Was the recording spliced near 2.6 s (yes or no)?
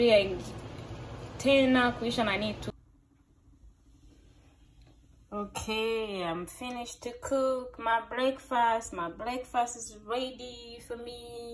yes